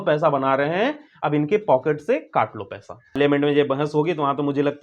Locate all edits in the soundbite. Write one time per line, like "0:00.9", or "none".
0:03.2

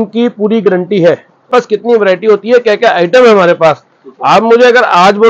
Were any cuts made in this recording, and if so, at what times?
0:01.5

